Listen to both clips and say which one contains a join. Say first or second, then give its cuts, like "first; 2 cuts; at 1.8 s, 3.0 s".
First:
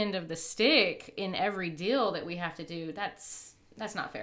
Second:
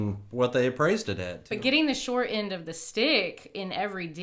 second; 1 cut; at 1.5 s